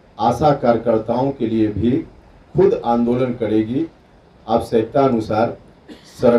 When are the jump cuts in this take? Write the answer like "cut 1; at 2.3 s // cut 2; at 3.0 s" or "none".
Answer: none